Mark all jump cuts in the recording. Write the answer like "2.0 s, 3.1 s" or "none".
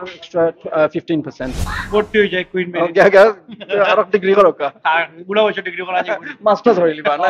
1.7 s